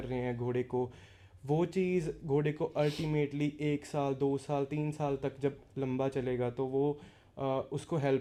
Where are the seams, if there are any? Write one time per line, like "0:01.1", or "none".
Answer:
none